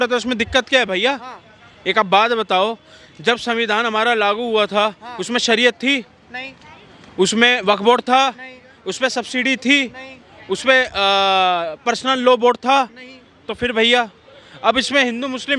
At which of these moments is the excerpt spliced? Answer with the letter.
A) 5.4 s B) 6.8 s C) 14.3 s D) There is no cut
D